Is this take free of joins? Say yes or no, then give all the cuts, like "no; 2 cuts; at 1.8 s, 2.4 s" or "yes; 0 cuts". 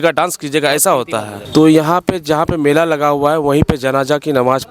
no; 1 cut; at 1.4 s